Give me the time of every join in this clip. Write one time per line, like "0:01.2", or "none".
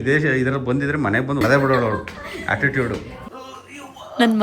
0:01.4
0:03.2